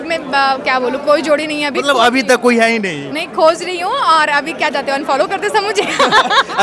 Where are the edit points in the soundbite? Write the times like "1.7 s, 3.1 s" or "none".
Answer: none